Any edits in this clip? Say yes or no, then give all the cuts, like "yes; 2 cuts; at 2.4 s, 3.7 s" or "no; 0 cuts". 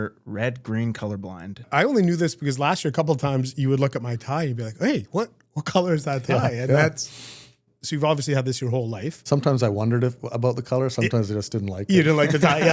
yes; 2 cuts; at 1.7 s, 7.7 s